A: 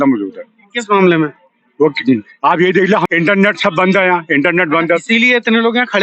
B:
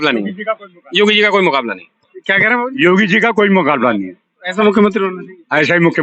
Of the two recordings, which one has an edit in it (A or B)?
A